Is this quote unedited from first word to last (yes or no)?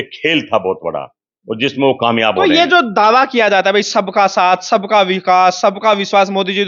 yes